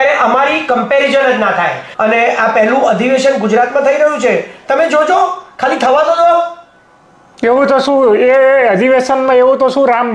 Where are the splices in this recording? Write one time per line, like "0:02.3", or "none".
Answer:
0:01.8

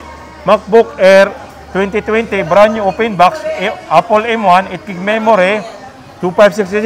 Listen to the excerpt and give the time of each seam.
none

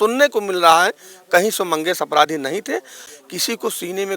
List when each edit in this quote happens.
0:03.1

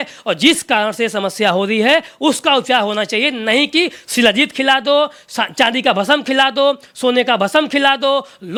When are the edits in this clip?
none

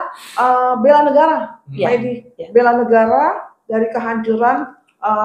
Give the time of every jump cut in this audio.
none

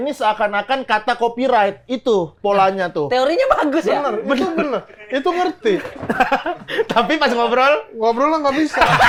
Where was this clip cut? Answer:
none

